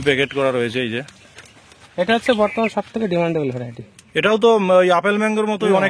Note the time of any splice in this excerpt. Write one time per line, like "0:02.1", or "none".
none